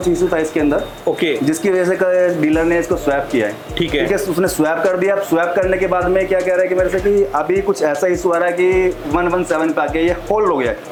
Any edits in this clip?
no; 0 cuts

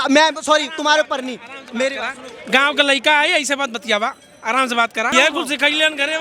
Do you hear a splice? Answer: yes; 1 cut; at 5.1 s

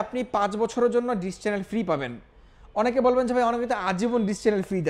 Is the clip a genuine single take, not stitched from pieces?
yes; 0 cuts

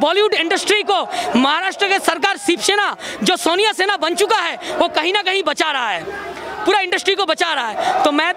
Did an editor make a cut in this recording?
no; 0 cuts

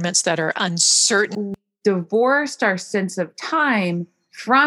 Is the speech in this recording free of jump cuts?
no; 1 cut; at 1.4 s

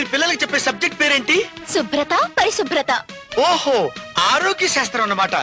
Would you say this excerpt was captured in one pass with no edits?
yes; 0 cuts

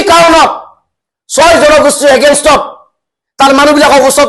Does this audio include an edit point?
no; 0 cuts

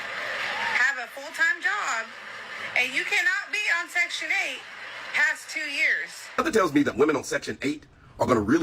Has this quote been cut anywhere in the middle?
yes; 1 cut; at 6.4 s

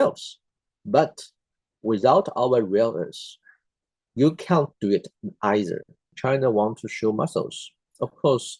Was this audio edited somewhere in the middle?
yes; 1 cut; at 6.1 s

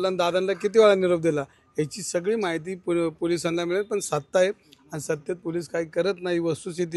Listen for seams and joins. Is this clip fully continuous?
yes; 0 cuts

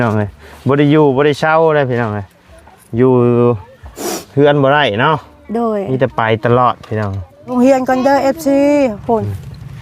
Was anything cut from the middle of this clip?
yes; 1 cut; at 7.5 s

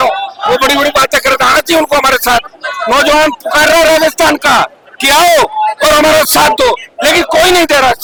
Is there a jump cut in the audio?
no; 0 cuts

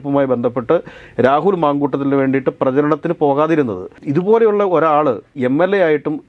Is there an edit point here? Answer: no; 0 cuts

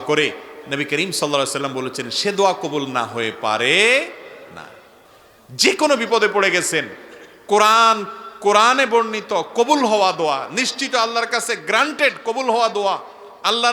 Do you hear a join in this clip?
yes; 1 cut; at 5.0 s

